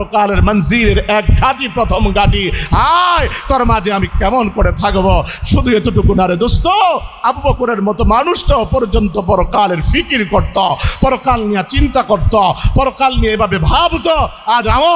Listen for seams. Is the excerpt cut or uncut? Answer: uncut